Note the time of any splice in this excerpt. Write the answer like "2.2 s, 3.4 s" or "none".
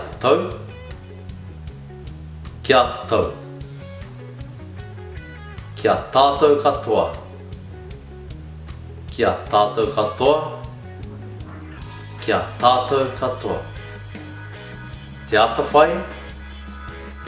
7.2 s, 9.1 s, 10.7 s, 12.2 s, 13.7 s, 15.3 s